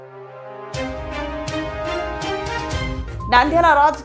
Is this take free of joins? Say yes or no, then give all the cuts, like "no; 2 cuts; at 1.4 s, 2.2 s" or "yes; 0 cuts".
no; 1 cut; at 3.1 s